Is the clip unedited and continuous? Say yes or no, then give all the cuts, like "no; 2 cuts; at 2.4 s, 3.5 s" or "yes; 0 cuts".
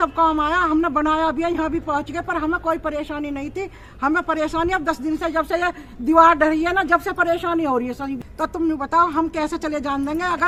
yes; 0 cuts